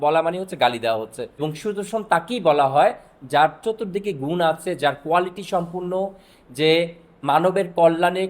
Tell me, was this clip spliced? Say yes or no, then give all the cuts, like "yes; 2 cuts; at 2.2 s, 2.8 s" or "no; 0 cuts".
yes; 1 cut; at 1.3 s